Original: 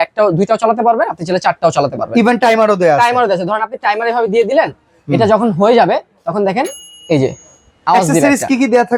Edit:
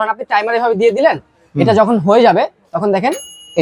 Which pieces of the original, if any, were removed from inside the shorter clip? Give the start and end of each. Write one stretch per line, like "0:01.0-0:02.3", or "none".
none